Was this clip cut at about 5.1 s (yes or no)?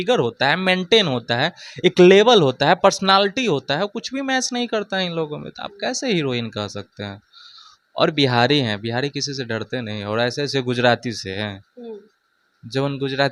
no